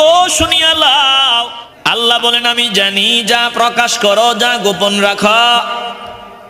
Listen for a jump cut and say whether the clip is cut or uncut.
cut